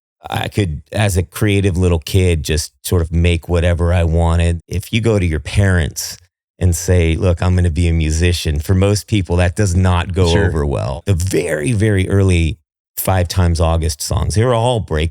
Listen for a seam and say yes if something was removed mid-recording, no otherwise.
yes